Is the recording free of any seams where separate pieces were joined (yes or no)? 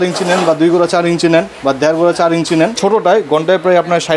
no